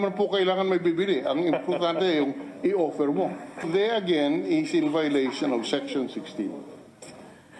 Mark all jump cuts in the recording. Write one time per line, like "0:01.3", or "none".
0:03.7